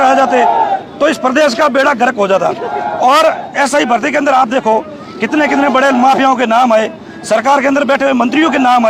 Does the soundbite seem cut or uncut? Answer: uncut